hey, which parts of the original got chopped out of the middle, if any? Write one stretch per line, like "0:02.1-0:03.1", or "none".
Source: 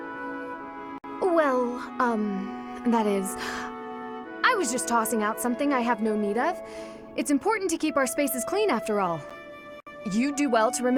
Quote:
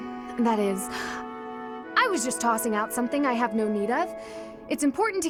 none